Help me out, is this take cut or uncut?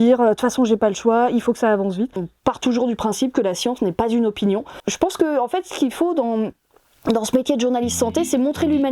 cut